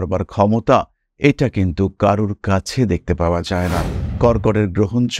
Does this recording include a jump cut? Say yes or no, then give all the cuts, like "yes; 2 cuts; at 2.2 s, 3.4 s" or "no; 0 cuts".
yes; 1 cut; at 4.0 s